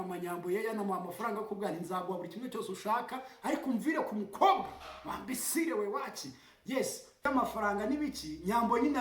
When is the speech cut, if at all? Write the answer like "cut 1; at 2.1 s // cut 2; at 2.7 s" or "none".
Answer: cut 1; at 7.2 s